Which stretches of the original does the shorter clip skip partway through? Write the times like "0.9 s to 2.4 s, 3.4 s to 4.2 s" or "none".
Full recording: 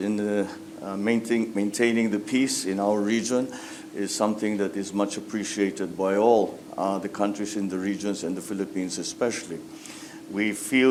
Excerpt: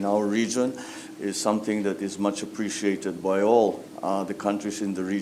none